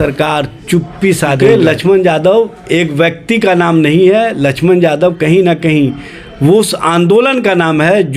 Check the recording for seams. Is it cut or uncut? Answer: cut